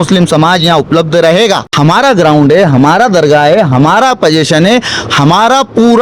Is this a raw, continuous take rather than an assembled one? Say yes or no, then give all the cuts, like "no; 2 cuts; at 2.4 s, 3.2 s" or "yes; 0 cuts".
no; 1 cut; at 1.7 s